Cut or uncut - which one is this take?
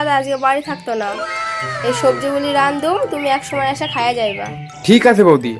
uncut